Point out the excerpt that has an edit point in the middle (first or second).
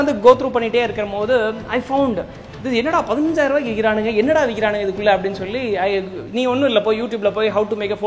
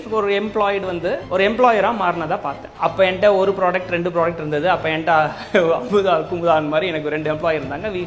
second